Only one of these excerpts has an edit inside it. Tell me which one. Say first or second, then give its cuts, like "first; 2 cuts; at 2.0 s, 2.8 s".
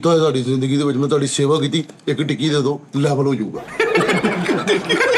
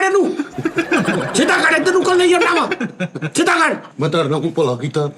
second; 1 cut; at 3.9 s